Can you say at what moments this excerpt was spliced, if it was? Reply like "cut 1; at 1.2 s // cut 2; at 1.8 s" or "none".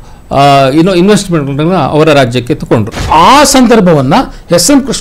cut 1; at 3.1 s